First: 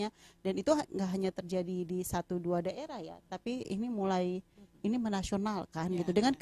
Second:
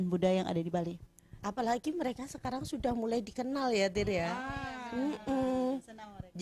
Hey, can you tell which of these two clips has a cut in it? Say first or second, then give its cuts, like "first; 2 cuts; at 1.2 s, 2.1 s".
second; 1 cut; at 1.0 s